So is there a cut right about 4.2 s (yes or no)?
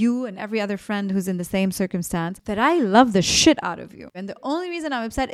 yes